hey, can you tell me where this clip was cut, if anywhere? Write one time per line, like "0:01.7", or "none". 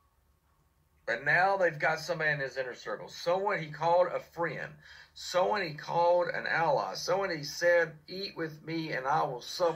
none